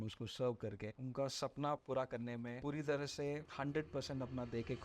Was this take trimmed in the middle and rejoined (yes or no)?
yes